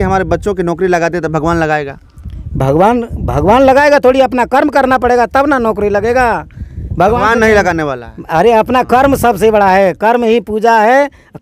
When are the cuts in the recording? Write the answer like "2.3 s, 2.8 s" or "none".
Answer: none